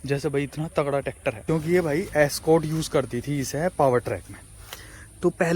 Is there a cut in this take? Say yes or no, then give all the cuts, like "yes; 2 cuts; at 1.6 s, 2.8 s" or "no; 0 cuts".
yes; 1 cut; at 1.4 s